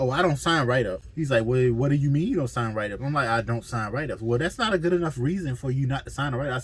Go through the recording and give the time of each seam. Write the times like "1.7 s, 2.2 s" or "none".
1.1 s